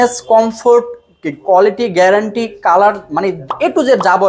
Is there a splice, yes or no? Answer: no